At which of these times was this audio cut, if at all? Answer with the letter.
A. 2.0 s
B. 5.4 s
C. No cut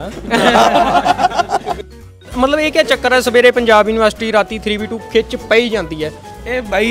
A